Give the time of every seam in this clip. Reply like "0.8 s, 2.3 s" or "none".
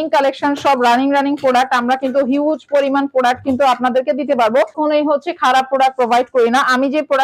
4.7 s